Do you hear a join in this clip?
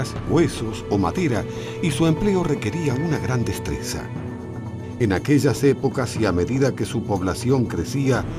yes; 1 cut; at 5.6 s

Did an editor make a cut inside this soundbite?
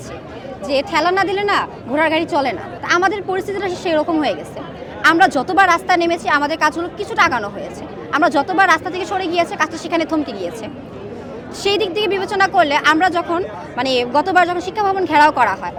no; 0 cuts

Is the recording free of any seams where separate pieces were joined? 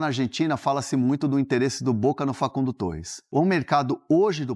no; 1 cut; at 3.2 s

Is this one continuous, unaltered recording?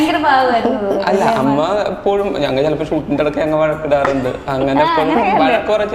yes; 0 cuts

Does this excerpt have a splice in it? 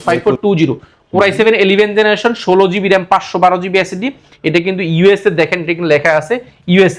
no; 0 cuts

